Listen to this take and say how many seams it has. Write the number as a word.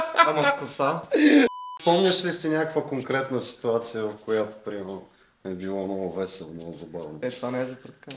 one